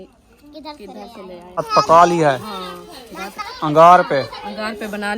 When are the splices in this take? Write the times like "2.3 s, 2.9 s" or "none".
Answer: 1.6 s